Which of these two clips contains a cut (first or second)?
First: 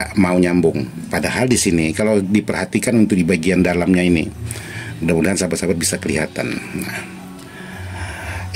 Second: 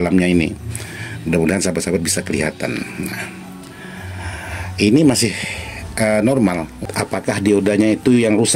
second